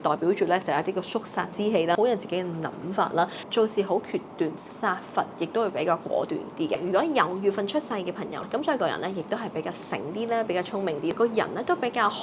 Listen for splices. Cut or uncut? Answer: cut